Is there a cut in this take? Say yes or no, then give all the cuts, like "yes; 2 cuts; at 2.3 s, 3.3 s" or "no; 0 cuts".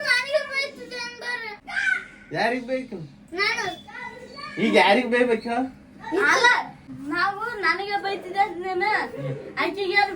yes; 2 cuts; at 1.6 s, 6.8 s